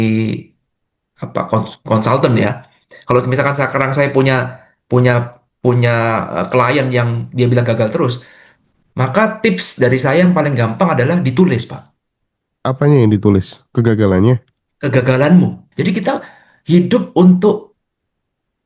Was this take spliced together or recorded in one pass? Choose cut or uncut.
cut